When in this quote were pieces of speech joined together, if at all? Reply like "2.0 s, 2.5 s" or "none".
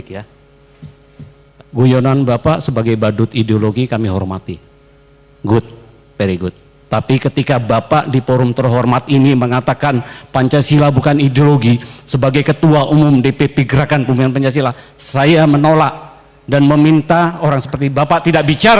1.4 s